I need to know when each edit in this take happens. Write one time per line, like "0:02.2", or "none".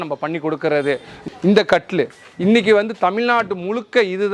0:01.2